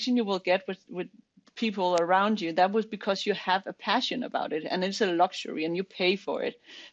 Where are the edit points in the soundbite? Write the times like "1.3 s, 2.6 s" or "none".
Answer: none